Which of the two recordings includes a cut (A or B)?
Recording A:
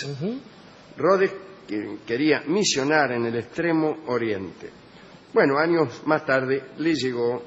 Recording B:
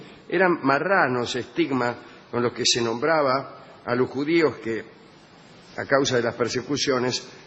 B